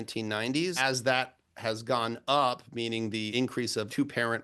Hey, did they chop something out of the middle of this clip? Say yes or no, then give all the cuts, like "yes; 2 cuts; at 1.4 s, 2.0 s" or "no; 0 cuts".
yes; 2 cuts; at 0.8 s, 3.3 s